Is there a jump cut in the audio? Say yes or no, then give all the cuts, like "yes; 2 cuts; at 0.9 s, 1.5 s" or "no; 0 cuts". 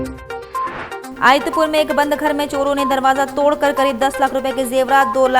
yes; 1 cut; at 1.1 s